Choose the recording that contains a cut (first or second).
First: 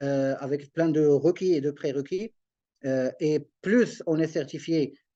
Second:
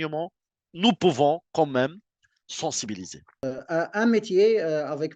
second